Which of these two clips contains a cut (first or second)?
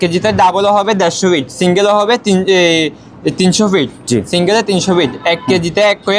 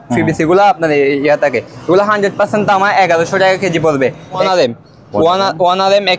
second